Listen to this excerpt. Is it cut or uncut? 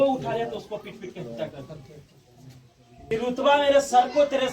cut